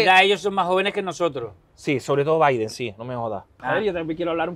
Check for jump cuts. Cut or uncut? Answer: cut